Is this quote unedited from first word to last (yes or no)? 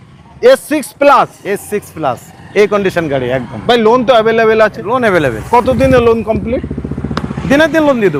yes